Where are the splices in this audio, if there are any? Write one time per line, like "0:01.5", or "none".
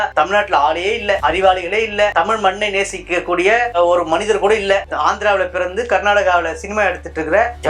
none